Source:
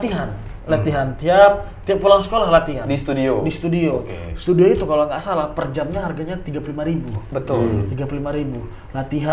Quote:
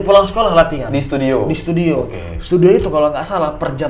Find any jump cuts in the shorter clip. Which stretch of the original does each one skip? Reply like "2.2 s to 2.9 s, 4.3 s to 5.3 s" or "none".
none